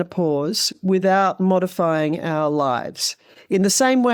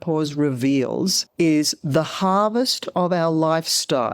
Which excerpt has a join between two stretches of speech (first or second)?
second